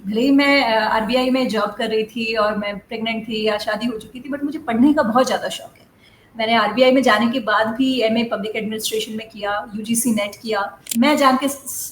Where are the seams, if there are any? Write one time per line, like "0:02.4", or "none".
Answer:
0:10.8